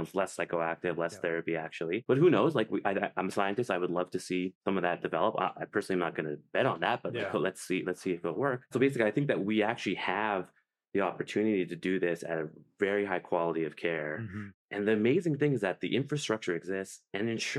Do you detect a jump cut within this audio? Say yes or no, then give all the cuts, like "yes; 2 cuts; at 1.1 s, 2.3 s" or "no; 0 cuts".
no; 0 cuts